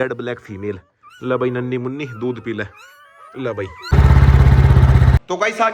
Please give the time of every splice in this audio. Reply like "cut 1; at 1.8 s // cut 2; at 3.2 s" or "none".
none